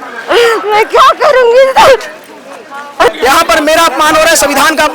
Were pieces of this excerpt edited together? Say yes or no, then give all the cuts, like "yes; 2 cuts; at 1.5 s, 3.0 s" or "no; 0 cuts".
yes; 1 cut; at 3.1 s